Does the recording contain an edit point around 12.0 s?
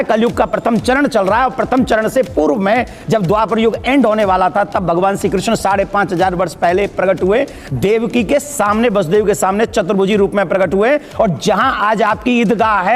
no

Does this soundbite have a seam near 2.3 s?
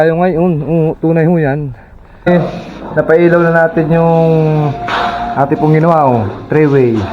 yes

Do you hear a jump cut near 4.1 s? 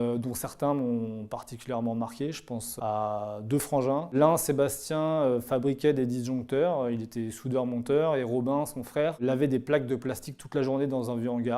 yes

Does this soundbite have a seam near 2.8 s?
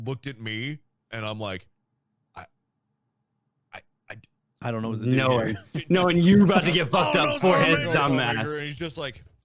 no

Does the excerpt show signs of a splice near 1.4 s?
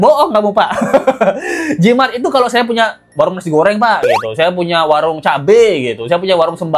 no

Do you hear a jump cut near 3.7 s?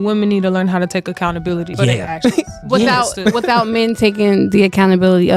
no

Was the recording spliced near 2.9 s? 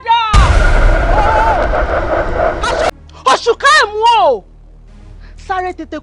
yes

